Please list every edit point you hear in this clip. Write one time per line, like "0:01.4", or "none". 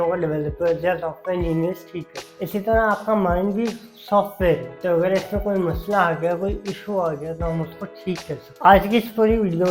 0:08.4